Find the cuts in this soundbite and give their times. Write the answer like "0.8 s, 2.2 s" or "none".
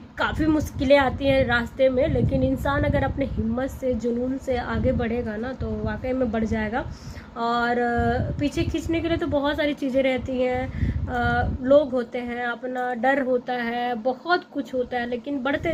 none